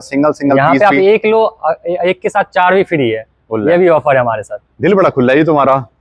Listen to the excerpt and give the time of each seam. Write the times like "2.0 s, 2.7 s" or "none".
none

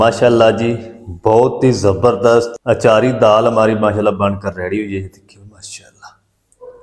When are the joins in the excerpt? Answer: 2.5 s

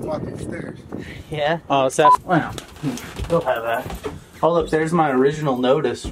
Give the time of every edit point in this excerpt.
2.1 s

